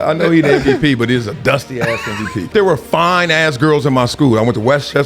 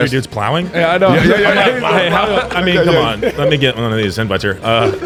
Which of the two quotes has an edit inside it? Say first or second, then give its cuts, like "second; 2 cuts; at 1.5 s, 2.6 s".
first; 1 cut; at 2.5 s